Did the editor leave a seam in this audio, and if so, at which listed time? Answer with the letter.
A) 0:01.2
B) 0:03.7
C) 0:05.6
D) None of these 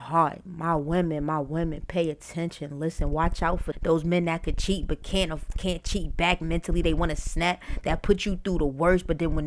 B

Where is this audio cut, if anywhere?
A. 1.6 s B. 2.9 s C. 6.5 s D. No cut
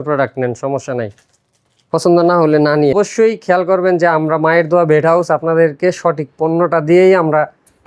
B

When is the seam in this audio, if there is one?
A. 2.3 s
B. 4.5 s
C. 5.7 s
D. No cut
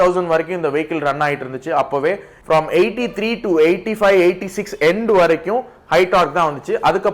A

